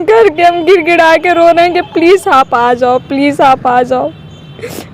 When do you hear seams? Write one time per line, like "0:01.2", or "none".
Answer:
none